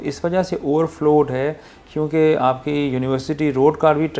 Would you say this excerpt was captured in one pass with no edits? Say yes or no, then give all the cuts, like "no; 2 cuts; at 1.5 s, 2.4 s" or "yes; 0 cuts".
yes; 0 cuts